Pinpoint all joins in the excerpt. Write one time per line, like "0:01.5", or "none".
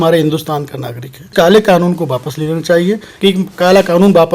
0:01.3
0:03.1